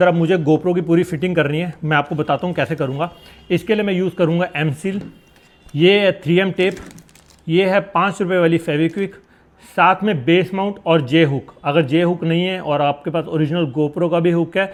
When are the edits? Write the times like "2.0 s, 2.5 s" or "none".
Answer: none